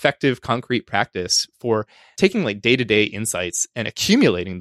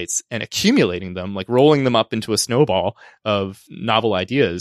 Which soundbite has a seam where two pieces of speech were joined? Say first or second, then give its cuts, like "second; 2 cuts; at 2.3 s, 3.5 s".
first; 1 cut; at 2.0 s